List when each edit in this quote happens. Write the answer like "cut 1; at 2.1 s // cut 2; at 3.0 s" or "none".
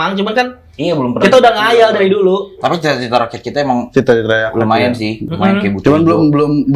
cut 1; at 5.2 s